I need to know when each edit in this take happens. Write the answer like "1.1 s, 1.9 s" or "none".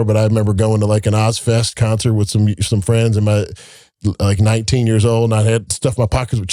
none